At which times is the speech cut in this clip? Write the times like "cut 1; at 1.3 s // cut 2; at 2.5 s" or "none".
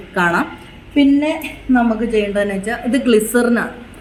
none